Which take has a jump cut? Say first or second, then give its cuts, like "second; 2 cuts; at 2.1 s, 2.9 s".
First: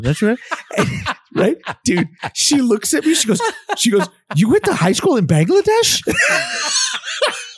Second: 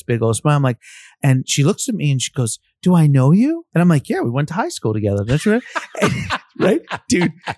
second; 2 cuts; at 1.2 s, 3.6 s